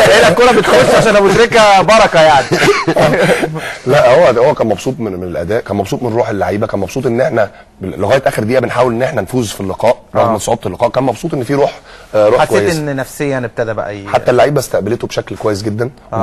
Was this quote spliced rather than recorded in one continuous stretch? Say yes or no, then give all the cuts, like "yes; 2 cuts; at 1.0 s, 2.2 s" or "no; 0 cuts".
no; 0 cuts